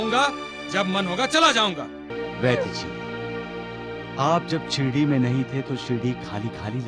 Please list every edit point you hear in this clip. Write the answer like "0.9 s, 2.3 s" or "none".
2.1 s